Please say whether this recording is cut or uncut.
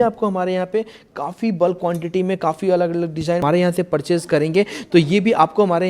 cut